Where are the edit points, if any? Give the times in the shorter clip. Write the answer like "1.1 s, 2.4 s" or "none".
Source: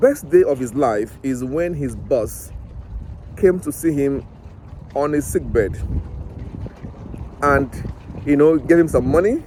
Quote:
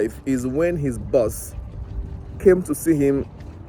none